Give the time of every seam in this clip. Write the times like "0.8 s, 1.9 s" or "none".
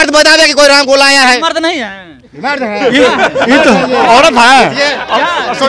none